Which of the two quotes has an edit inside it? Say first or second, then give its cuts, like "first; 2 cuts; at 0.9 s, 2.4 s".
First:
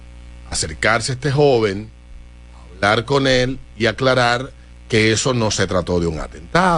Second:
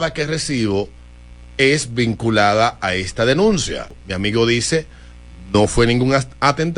second; 1 cut; at 4.0 s